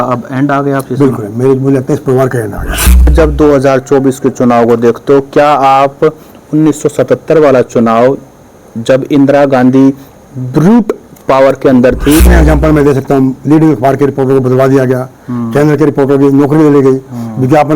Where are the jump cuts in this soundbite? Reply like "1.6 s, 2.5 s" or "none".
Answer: 3.1 s, 12.3 s